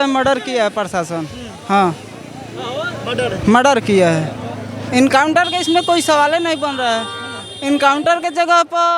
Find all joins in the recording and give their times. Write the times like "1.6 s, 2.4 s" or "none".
none